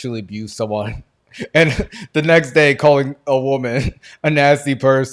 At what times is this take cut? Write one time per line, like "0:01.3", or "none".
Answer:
none